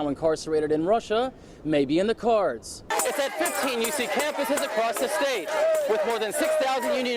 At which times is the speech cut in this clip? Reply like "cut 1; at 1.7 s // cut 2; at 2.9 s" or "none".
cut 1; at 2.8 s

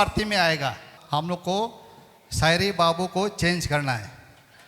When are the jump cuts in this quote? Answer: cut 1; at 0.9 s

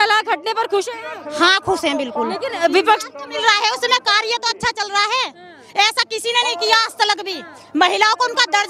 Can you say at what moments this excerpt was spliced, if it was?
none

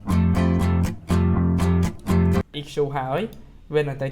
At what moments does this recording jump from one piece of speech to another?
cut 1; at 2.6 s

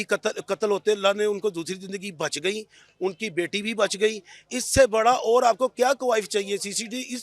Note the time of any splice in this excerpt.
none

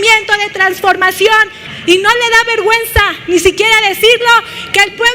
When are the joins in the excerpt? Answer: cut 1; at 1.6 s

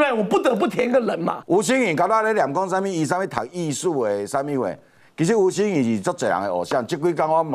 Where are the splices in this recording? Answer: cut 1; at 1.4 s

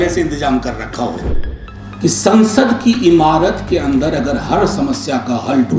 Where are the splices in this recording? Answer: cut 1; at 1.3 s

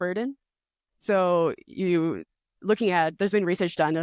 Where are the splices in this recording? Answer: none

